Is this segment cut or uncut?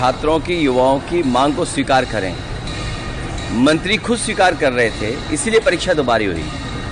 uncut